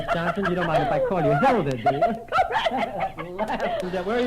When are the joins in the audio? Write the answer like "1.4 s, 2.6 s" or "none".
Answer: 1.1 s

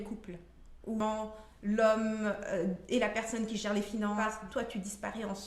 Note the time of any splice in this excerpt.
1.0 s, 4.3 s

